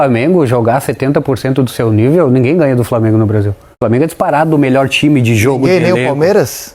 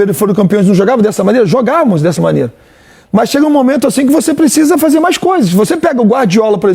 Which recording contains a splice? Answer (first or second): first